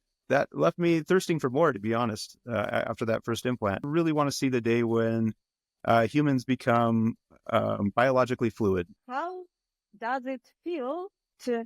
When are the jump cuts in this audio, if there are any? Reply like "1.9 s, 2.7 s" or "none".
3.9 s, 9.0 s